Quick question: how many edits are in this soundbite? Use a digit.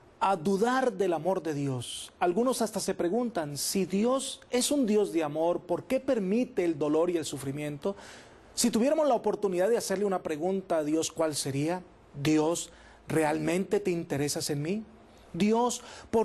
0